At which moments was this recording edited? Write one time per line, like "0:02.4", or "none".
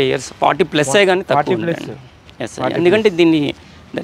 none